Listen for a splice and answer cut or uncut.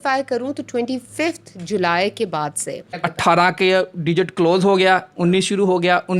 cut